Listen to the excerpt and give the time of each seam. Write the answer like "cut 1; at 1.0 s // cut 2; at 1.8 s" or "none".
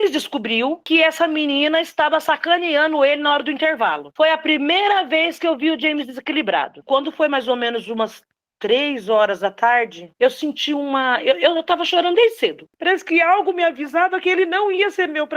cut 1; at 4.1 s // cut 2; at 6.7 s // cut 3; at 12.7 s